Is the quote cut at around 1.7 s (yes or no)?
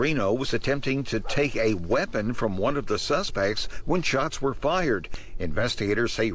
no